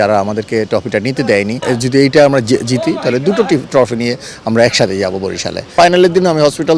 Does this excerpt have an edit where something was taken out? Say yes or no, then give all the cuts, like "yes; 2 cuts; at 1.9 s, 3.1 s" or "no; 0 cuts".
yes; 2 cuts; at 1.6 s, 5.7 s